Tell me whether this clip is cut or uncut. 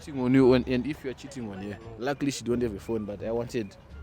cut